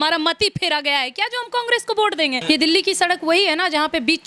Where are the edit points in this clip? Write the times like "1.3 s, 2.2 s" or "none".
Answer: 2.4 s